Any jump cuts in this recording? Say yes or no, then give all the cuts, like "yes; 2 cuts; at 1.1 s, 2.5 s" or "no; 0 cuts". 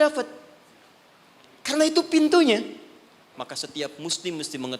yes; 1 cut; at 3.4 s